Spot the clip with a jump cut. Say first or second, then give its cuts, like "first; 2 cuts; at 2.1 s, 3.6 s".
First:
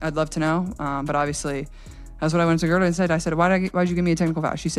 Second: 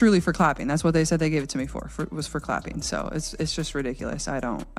second; 1 cut; at 3.1 s